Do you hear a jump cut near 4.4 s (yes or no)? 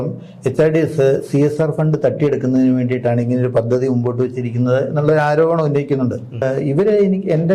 no